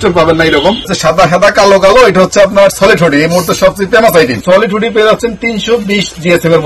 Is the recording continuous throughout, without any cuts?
no; 2 cuts; at 0.9 s, 4.4 s

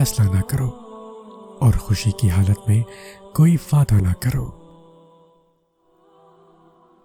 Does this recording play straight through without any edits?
yes; 0 cuts

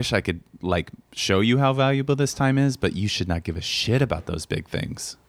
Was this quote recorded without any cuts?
yes; 0 cuts

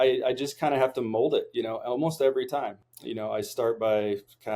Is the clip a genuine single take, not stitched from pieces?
yes; 0 cuts

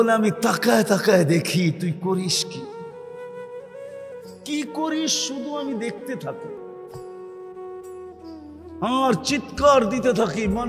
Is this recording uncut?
no; 2 cuts; at 2.3 s, 4.0 s

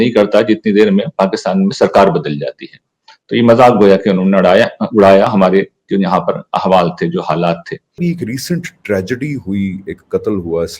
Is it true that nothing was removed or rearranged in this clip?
no; 1 cut; at 8.0 s

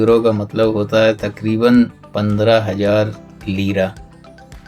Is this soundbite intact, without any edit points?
yes; 0 cuts

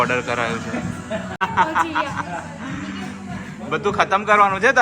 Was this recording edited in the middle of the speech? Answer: yes; 1 cut; at 1.4 s

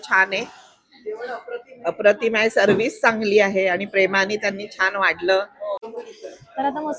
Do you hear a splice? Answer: yes; 1 cut; at 5.8 s

